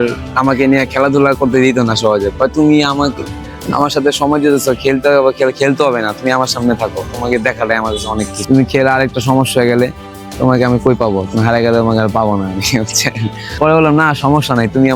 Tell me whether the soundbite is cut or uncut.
uncut